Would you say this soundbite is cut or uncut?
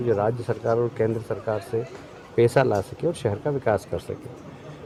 uncut